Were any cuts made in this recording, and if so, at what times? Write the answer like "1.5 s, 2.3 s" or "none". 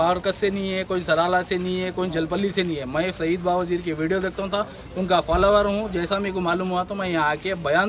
none